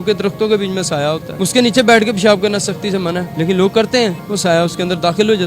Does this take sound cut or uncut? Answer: cut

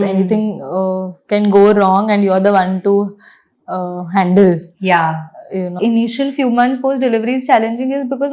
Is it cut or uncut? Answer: cut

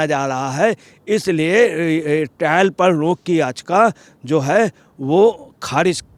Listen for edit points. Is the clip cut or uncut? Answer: uncut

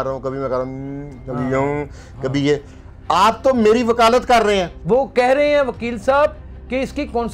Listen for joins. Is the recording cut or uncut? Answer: cut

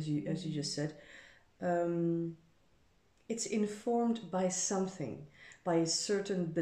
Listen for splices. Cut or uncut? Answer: uncut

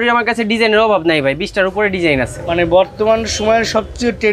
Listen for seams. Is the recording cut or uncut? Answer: uncut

